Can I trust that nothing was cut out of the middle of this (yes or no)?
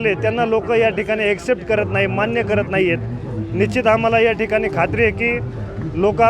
yes